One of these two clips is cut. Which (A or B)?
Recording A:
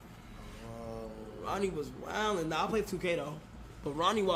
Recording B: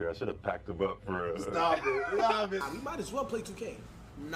B